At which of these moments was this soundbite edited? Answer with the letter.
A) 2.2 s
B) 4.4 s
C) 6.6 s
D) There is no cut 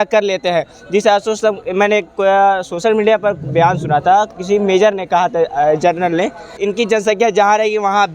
C